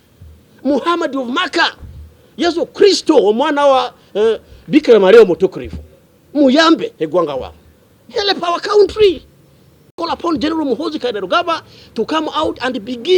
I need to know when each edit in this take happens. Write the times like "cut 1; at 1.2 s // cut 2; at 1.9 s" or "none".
cut 1; at 10.0 s